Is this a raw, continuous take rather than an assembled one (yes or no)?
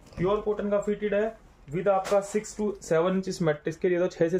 yes